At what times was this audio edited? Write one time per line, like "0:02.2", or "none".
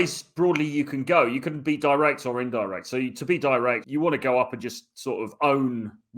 0:03.8